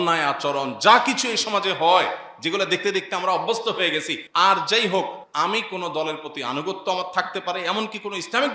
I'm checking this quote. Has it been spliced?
yes; 2 cuts; at 4.2 s, 5.2 s

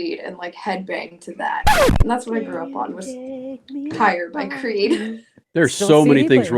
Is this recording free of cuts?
no; 1 cut; at 5.4 s

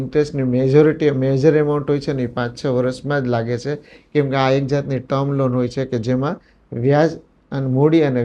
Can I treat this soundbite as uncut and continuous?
yes; 0 cuts

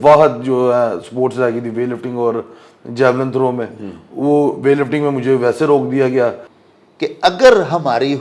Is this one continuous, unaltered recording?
no; 1 cut; at 6.5 s

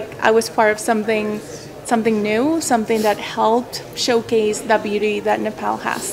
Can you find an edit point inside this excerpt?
no; 0 cuts

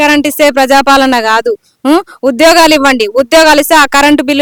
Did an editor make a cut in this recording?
no; 0 cuts

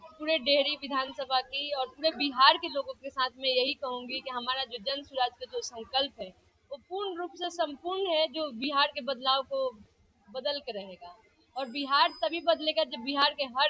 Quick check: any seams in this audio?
no; 0 cuts

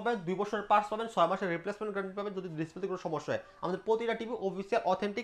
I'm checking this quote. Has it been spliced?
no; 0 cuts

